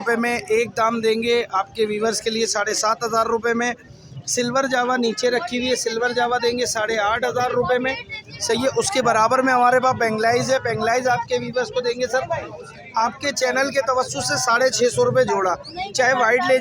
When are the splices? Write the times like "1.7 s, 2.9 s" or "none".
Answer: none